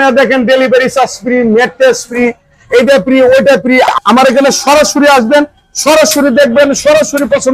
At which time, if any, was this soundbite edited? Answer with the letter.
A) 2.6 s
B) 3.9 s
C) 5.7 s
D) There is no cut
B